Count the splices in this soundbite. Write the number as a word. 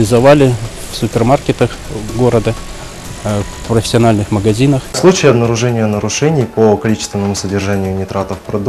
one